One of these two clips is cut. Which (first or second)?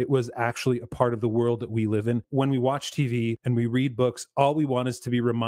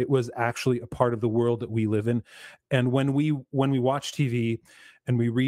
first